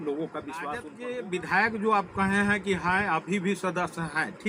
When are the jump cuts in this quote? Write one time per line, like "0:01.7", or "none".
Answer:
0:00.9